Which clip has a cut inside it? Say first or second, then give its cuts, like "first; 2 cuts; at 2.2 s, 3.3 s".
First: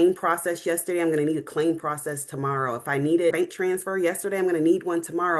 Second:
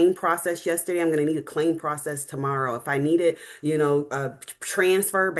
first; 1 cut; at 3.3 s